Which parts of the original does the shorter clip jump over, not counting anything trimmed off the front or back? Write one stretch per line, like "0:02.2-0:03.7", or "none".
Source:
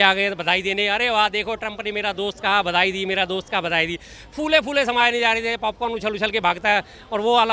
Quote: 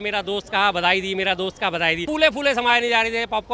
0:03.9-0:04.3